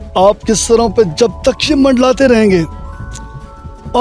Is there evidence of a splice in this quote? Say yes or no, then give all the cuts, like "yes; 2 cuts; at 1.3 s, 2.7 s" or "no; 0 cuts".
no; 0 cuts